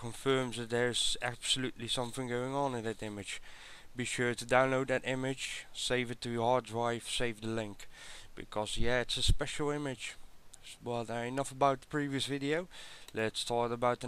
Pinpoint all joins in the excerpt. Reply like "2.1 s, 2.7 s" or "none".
1.3 s